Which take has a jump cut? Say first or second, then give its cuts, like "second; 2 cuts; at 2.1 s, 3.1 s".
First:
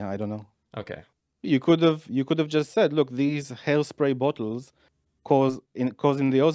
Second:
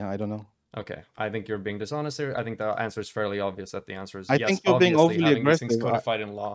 first; 1 cut; at 1.0 s